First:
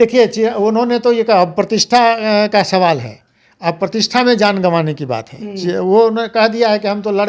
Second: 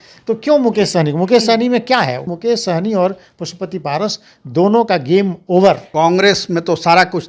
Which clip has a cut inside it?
second; 2 cuts; at 2.2 s, 5.9 s

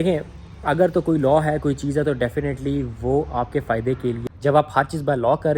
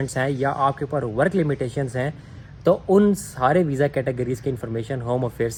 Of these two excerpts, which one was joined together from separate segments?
first; 1 cut; at 4.2 s

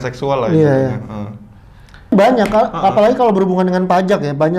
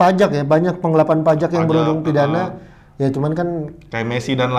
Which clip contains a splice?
first; 1 cut; at 2.1 s

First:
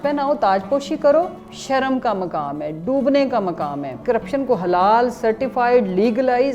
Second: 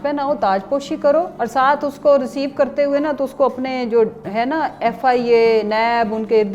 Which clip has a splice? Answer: first; 2 cuts; at 1.3 s, 3.9 s

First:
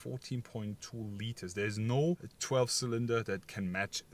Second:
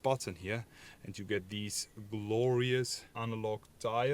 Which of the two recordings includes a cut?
second; 1 cut; at 3.1 s

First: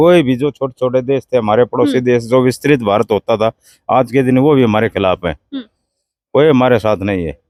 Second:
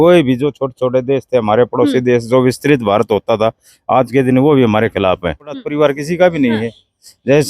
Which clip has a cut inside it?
second; 1 cut; at 5.6 s

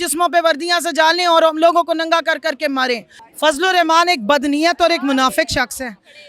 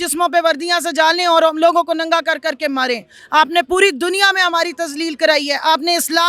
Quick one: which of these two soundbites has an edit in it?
first; 1 cut; at 3.1 s

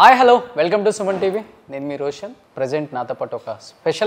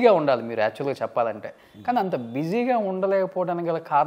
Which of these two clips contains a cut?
first; 1 cut; at 2.4 s

